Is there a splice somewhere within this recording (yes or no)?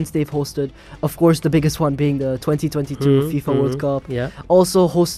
no